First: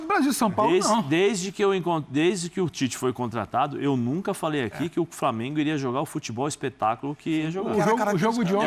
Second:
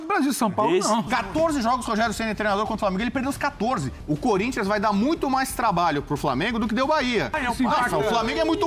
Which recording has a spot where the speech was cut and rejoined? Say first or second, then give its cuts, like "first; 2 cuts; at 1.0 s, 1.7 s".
second; 3 cuts; at 1.1 s, 3.9 s, 7.4 s